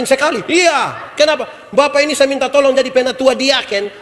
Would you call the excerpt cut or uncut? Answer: uncut